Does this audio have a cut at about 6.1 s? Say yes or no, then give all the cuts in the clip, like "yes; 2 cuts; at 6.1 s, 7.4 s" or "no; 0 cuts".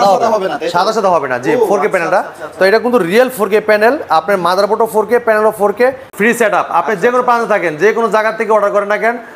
yes; 1 cut; at 6.1 s